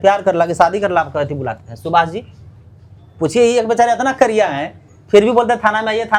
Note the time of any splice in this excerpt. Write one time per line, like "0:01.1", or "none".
none